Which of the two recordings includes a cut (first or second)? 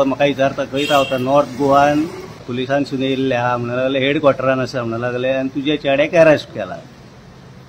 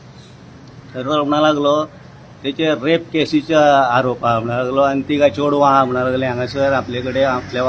first